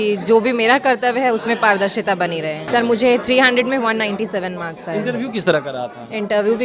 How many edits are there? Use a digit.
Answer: 1